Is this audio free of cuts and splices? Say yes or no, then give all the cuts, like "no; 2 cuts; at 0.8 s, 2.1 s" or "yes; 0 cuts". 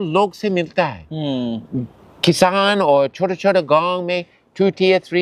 yes; 0 cuts